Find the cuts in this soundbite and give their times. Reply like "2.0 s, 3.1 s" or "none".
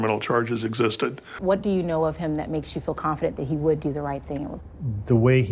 1.4 s